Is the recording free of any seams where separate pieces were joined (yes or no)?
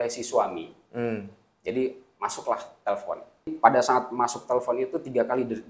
no